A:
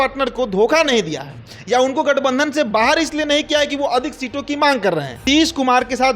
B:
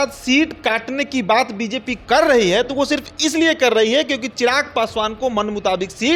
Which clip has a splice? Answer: A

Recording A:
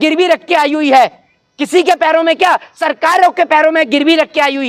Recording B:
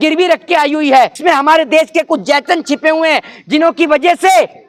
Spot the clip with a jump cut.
B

